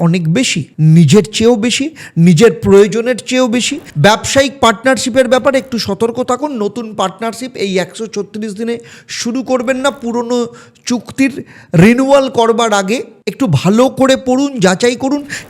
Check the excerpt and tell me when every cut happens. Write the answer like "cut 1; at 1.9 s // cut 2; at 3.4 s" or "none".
cut 1; at 3.8 s